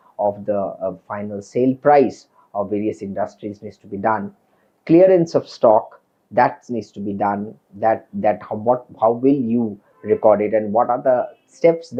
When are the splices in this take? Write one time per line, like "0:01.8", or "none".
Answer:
none